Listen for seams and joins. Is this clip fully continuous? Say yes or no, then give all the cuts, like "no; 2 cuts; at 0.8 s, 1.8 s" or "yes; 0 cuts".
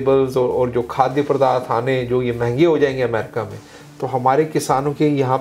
yes; 0 cuts